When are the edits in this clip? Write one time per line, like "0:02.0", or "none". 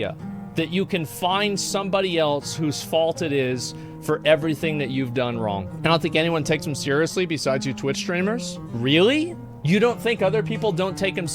0:05.7
0:08.6
0:09.5